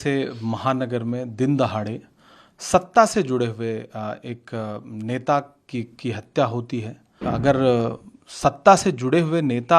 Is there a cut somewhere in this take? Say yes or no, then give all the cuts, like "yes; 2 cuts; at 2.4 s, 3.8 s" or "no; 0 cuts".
yes; 1 cut; at 7.3 s